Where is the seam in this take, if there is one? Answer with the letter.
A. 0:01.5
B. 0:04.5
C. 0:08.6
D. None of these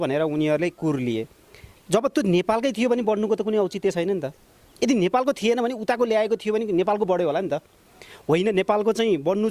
D